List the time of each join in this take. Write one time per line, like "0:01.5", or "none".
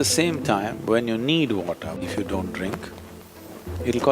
0:02.0